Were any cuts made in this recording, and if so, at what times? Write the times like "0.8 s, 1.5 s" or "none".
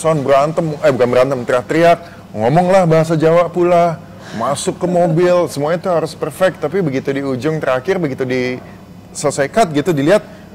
none